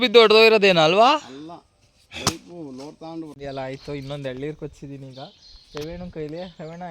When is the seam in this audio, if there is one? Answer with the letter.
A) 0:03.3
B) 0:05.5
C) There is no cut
A